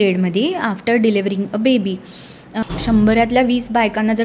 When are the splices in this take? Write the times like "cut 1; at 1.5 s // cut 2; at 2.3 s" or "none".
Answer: cut 1; at 2.6 s

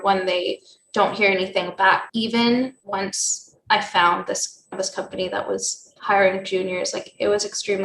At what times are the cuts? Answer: cut 1; at 2.1 s

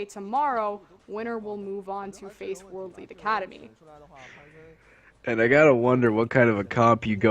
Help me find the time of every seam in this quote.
cut 1; at 2.9 s

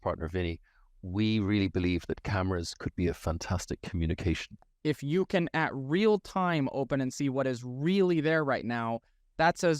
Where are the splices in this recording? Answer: cut 1; at 4.7 s

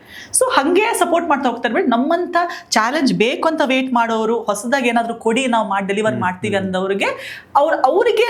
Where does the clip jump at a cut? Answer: none

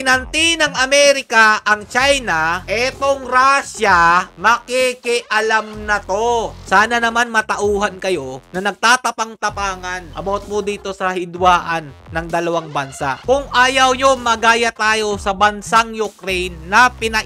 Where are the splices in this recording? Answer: cut 1; at 6.5 s // cut 2; at 13.2 s

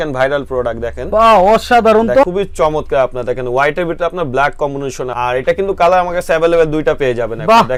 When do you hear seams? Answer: none

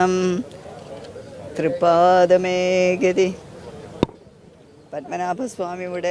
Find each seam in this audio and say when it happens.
none

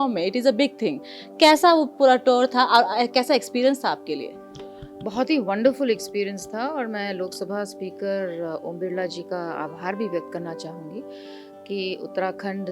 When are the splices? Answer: none

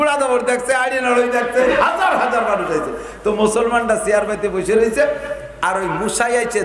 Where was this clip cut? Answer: cut 1; at 1.7 s

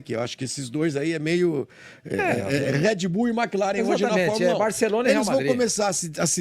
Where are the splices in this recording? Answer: none

